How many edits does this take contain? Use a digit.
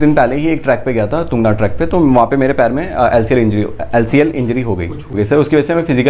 1